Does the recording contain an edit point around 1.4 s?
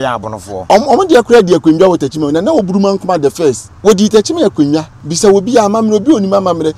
no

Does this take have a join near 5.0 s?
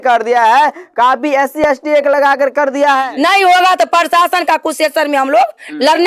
no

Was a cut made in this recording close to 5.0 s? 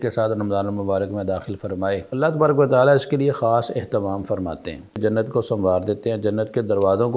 yes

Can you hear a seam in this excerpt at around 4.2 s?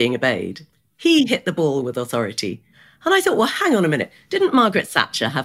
no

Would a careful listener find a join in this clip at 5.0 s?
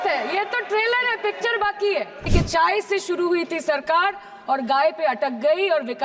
no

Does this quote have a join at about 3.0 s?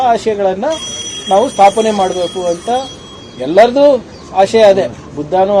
no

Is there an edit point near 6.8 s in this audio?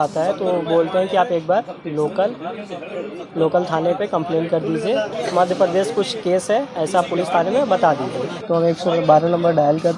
no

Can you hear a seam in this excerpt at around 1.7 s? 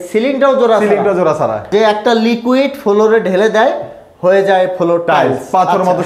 yes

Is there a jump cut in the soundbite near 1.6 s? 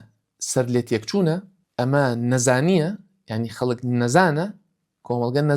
yes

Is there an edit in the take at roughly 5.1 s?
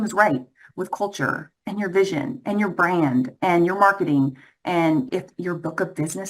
yes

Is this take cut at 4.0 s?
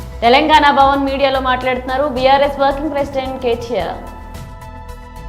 yes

